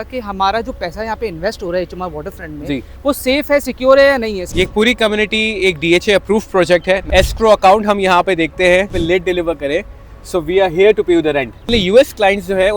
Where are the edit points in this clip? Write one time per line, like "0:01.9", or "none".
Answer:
0:04.4
0:07.0
0:09.0
0:11.7

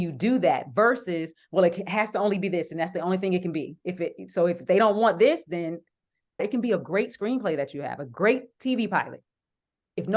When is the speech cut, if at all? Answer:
0:06.4

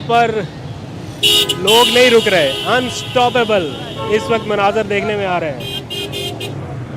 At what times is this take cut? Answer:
none

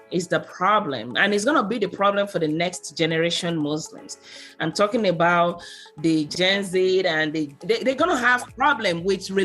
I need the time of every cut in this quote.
0:06.3
0:07.6

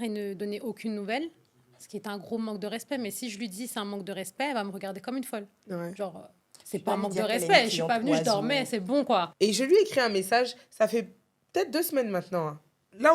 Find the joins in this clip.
0:09.3

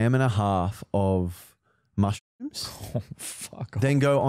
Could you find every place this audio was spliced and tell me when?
none

